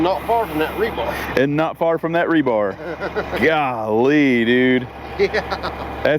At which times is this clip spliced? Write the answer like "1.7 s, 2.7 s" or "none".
none